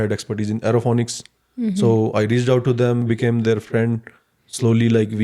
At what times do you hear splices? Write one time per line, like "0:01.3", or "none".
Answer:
0:03.0